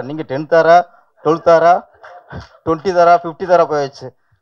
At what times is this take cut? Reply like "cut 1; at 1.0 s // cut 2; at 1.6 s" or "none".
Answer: none